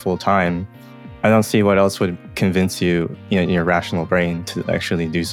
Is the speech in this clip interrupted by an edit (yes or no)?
yes